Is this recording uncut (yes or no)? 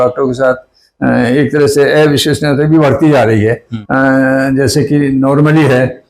no